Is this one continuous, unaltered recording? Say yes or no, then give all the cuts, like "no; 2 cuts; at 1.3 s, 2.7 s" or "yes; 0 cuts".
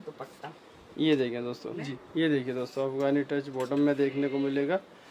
no; 1 cut; at 2.0 s